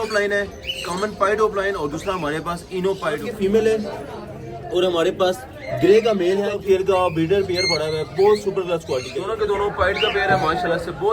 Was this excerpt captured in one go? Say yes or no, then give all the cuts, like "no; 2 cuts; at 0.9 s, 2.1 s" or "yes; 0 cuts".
no; 3 cuts; at 3.3 s, 6.5 s, 9.3 s